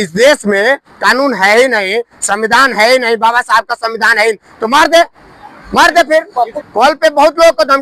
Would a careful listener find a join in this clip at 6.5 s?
yes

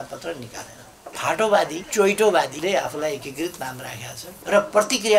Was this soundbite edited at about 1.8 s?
yes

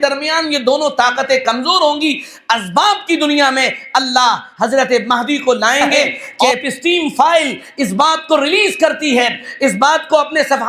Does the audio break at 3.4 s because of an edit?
no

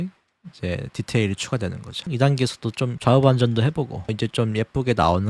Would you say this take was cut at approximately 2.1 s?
yes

